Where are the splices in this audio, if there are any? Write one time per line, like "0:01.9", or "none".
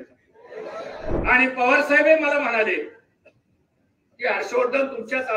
0:01.2